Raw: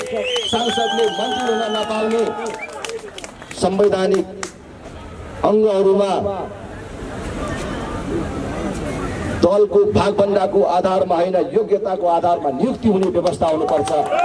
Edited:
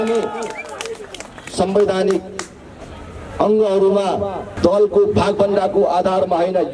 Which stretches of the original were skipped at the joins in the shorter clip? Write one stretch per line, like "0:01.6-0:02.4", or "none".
0:06.5-0:09.2